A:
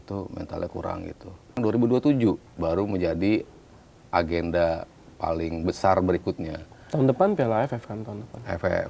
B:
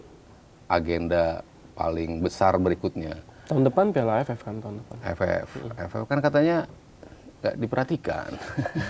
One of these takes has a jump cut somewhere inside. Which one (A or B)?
A